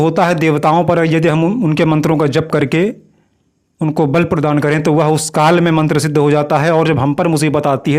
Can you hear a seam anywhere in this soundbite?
no; 0 cuts

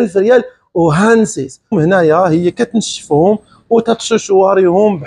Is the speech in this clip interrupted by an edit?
yes; 1 cut; at 1.7 s

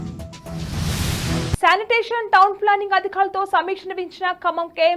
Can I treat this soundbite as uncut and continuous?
yes; 0 cuts

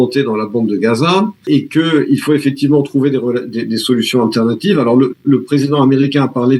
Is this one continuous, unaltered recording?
no; 1 cut; at 1.4 s

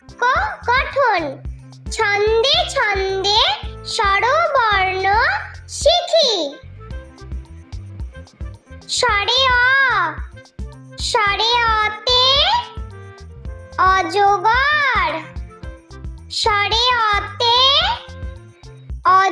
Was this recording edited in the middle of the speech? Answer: no; 0 cuts

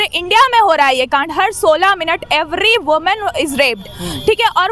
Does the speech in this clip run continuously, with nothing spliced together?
yes; 0 cuts

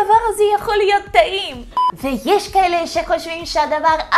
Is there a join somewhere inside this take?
yes; 1 cut; at 1.6 s

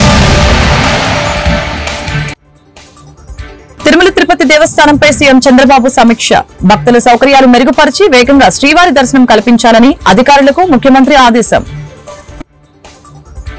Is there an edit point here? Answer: yes; 2 cuts; at 3.8 s, 11.7 s

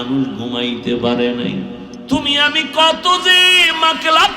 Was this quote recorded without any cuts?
no; 1 cut; at 1.9 s

